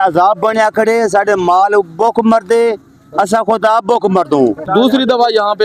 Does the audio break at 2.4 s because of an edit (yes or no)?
no